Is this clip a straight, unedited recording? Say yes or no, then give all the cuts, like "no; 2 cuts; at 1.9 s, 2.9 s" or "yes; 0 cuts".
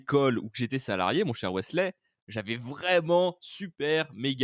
yes; 0 cuts